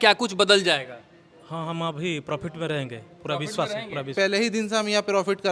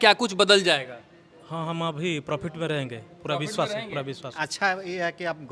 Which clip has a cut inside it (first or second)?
first